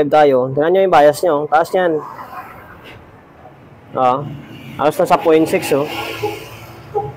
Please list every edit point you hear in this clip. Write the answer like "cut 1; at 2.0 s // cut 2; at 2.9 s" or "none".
none